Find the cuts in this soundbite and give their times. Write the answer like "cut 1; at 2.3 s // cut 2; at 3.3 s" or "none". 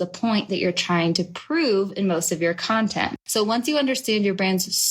cut 1; at 3.2 s